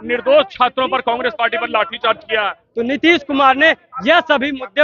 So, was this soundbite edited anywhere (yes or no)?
yes